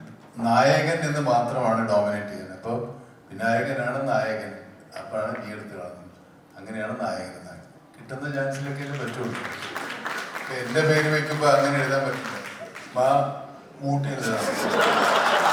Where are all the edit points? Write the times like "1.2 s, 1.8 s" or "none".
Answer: none